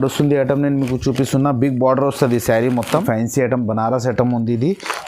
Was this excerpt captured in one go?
no; 1 cut; at 2.9 s

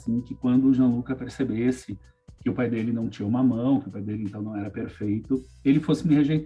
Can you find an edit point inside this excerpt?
no; 0 cuts

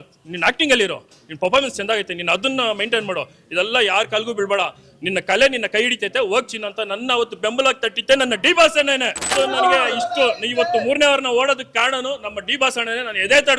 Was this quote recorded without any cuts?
no; 1 cut; at 9.3 s

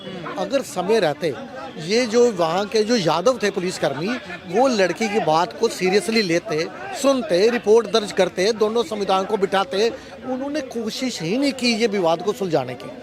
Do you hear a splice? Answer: no; 0 cuts

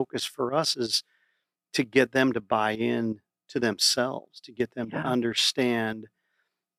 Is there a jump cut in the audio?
no; 0 cuts

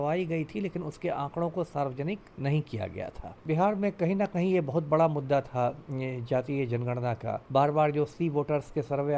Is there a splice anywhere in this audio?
yes; 3 cuts; at 2.3 s, 3.4 s, 7.4 s

